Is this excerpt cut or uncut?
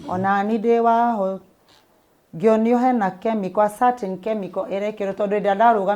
uncut